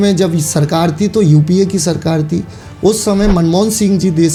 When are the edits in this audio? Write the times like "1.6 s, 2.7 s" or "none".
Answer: none